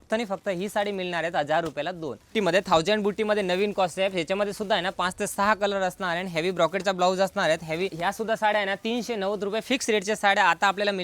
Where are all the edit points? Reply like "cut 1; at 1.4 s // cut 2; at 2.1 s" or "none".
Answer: cut 1; at 2.3 s // cut 2; at 7.9 s